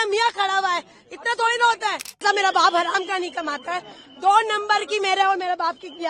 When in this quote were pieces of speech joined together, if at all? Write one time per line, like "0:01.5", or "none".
0:02.2